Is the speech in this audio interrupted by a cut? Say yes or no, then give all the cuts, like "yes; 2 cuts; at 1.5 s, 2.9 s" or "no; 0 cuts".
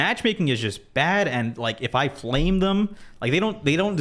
no; 0 cuts